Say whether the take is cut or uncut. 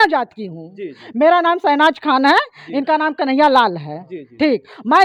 uncut